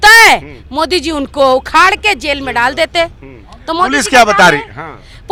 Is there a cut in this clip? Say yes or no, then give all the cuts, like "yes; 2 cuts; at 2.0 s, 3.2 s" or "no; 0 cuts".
no; 0 cuts